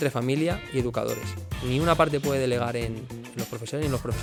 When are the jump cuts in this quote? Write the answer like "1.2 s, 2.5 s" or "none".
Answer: none

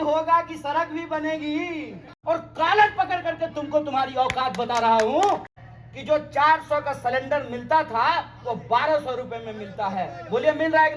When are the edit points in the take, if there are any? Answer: 2.1 s, 5.5 s

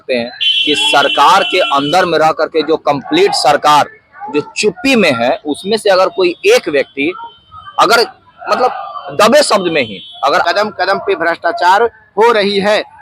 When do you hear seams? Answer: 10.4 s

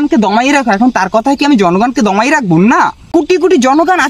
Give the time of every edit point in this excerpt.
3.0 s

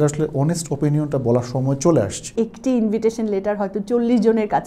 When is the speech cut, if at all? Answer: 2.3 s

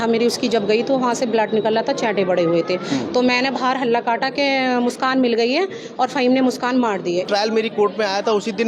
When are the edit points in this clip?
7.3 s

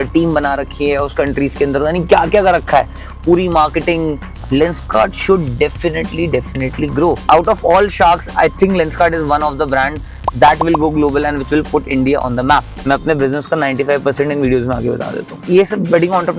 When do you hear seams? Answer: 4.2 s, 7.2 s, 12.7 s, 15.3 s

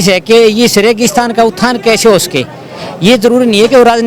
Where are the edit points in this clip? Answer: none

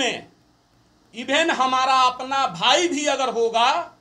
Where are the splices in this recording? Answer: none

